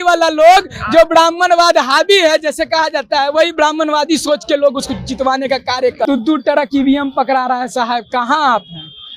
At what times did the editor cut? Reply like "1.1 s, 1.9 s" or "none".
6.0 s